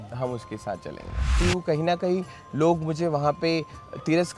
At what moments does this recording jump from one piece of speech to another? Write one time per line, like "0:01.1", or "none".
0:01.4